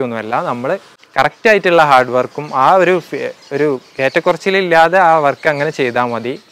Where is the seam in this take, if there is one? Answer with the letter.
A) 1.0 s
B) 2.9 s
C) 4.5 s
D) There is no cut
A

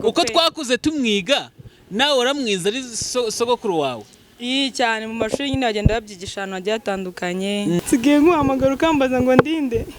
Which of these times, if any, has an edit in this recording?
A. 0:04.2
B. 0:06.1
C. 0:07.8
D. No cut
C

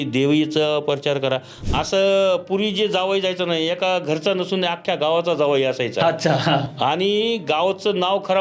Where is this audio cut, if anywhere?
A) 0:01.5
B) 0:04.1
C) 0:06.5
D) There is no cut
A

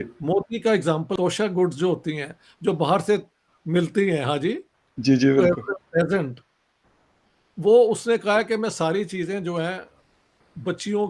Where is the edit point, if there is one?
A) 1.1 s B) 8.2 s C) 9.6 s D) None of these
A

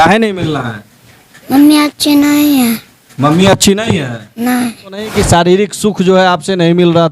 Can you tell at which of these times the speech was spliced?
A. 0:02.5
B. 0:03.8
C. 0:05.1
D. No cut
C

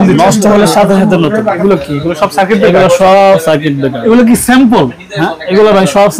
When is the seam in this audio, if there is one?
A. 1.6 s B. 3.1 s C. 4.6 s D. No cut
A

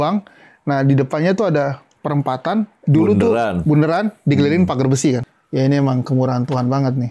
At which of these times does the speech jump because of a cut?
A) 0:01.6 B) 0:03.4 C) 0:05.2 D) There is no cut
C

